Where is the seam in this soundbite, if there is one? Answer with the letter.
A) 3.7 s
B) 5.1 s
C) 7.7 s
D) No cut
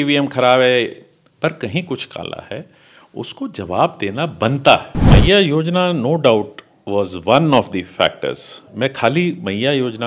B